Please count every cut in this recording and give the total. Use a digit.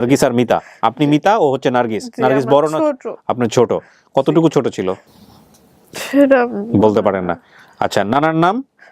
0